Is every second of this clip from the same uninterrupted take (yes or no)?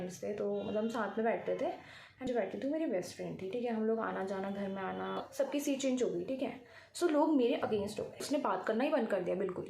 no